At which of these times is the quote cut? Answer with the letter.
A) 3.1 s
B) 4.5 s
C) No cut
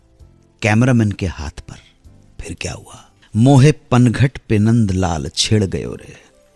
A